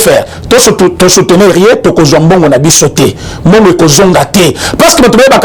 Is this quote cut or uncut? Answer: uncut